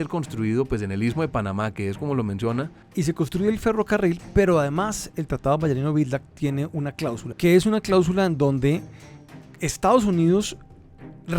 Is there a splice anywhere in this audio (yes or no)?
yes